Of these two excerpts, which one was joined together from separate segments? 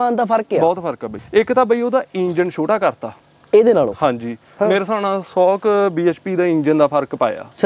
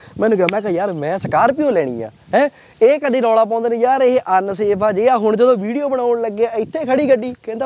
first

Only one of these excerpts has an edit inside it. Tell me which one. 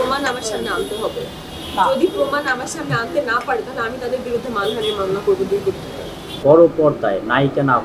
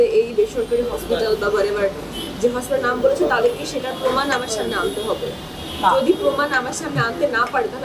first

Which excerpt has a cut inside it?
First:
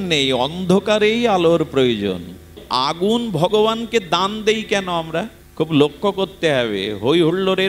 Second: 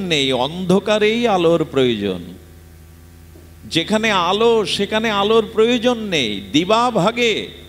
first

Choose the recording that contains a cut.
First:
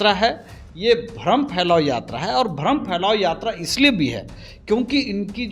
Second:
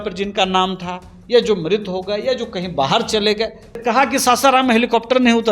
second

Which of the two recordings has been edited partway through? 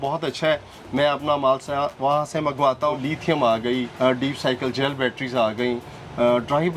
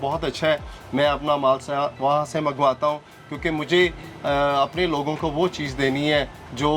first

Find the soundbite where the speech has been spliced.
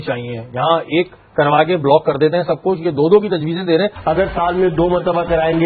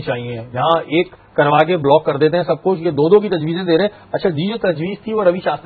first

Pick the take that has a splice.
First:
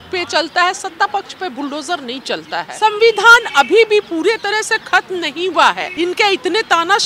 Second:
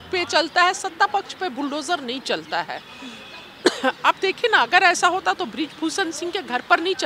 first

